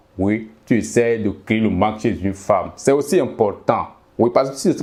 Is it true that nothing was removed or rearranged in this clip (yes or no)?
yes